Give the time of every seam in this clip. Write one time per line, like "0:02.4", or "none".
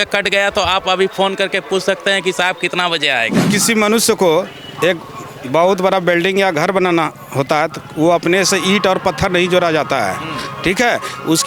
0:03.5